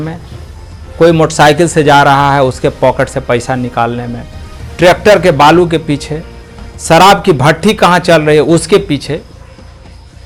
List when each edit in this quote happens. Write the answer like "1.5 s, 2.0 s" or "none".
none